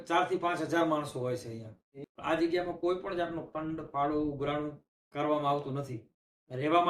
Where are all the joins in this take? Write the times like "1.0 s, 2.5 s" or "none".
2.0 s